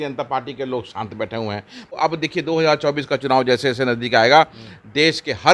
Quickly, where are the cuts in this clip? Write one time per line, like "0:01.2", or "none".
0:01.9

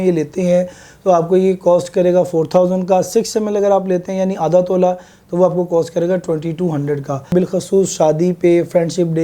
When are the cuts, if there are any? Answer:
0:07.3

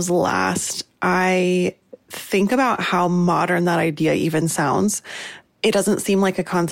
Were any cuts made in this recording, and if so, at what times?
none

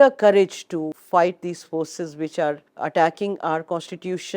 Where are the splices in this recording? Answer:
0:01.0
0:02.7

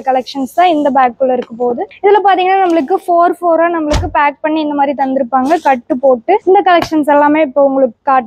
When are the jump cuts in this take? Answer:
0:06.4

